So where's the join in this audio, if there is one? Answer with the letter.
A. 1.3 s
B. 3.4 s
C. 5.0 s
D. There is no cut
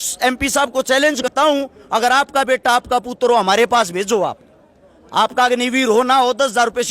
A